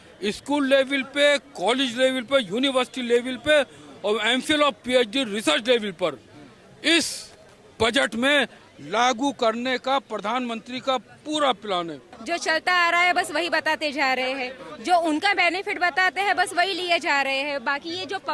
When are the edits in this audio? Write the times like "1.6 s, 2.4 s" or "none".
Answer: 12.1 s